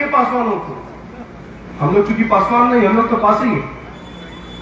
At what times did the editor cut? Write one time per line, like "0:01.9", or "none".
none